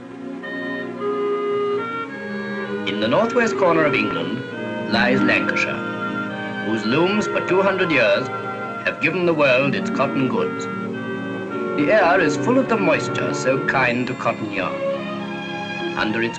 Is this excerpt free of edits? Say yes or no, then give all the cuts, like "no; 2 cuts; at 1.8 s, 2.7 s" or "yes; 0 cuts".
yes; 0 cuts